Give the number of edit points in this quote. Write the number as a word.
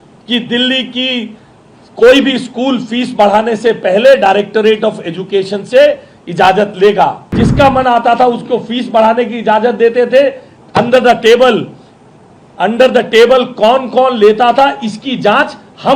one